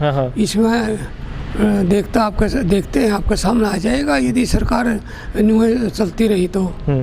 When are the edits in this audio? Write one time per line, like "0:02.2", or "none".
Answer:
none